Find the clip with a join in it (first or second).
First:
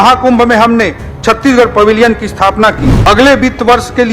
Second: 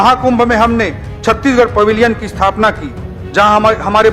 first